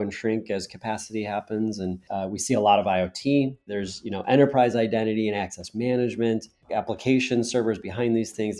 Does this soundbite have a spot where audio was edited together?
yes; 3 cuts; at 2.1 s, 3.7 s, 6.7 s

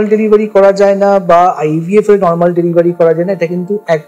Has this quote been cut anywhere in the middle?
no; 0 cuts

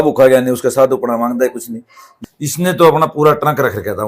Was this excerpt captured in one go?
no; 1 cut; at 2.1 s

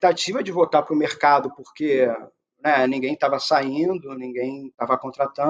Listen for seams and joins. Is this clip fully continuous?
yes; 0 cuts

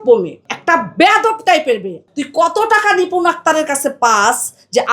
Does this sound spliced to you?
yes; 1 cut; at 2.1 s

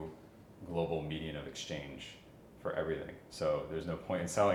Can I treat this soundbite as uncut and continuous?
yes; 0 cuts

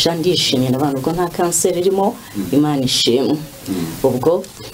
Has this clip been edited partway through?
no; 0 cuts

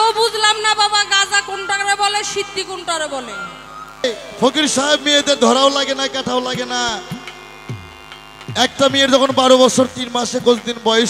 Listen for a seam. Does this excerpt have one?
yes; 1 cut; at 4.0 s

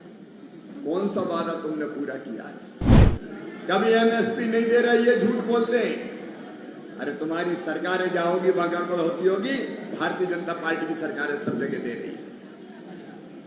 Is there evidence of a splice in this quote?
yes; 1 cut; at 2.8 s

